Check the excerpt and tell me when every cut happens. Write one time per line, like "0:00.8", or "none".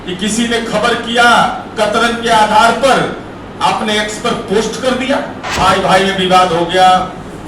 0:05.4